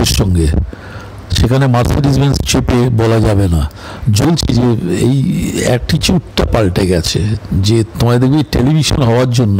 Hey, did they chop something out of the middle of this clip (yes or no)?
yes